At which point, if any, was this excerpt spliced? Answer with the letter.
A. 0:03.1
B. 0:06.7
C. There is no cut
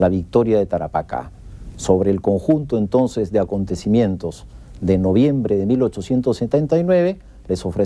A